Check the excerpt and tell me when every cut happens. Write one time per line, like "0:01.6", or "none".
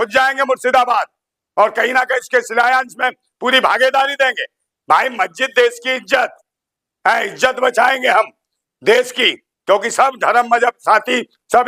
none